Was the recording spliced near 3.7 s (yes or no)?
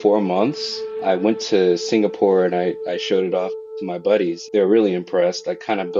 yes